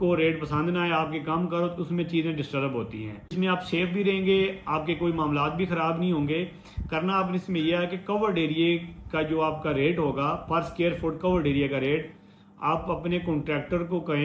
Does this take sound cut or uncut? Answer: cut